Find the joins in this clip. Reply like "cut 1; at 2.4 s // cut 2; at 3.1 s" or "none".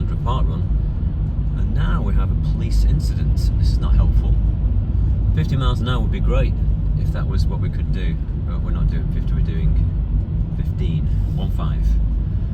none